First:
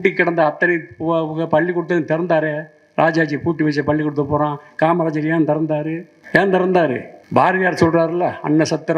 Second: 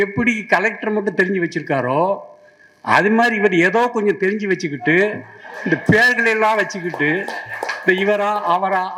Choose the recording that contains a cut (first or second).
first